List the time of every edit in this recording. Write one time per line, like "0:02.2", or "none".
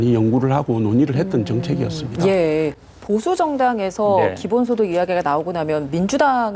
0:02.9